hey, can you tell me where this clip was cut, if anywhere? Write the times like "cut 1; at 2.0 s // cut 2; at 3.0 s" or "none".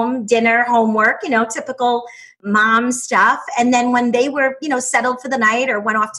cut 1; at 2.4 s